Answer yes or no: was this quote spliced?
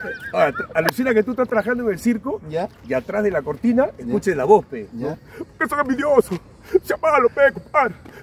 no